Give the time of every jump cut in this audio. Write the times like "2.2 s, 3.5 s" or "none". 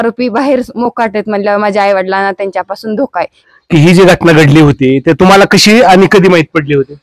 3.4 s